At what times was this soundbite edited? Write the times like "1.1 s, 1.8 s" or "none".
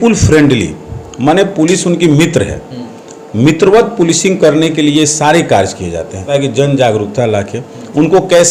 6.3 s